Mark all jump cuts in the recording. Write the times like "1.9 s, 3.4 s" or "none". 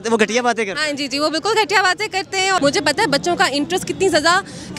2.6 s